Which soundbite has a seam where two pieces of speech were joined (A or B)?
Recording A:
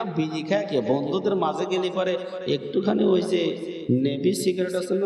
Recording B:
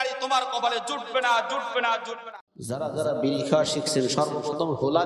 B